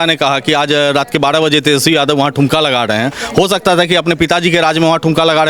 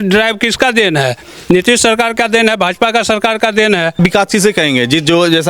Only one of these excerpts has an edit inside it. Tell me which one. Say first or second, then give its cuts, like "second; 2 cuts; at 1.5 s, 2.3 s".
second; 1 cut; at 4.0 s